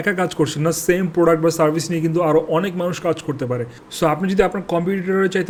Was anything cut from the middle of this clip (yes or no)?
no